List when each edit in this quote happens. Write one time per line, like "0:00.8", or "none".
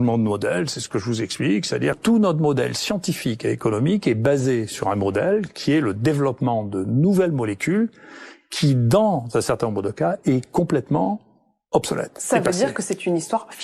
0:02.0